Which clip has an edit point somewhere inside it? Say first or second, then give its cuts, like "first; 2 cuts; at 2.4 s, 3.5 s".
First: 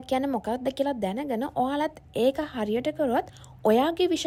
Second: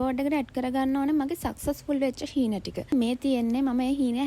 second; 1 cut; at 2.9 s